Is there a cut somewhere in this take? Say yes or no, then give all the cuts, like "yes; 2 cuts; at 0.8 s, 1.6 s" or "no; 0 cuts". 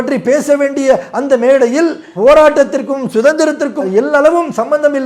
no; 0 cuts